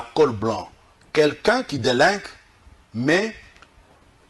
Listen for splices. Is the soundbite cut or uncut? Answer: uncut